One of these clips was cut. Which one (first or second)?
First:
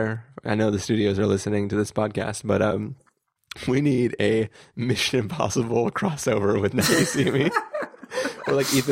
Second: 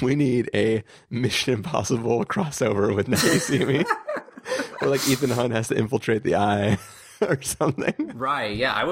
second